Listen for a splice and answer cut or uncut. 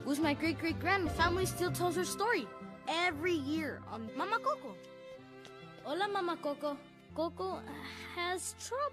cut